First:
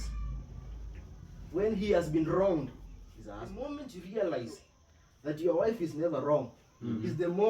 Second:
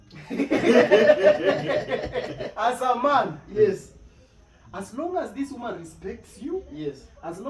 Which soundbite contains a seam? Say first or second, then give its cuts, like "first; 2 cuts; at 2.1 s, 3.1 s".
first; 1 cut; at 3.5 s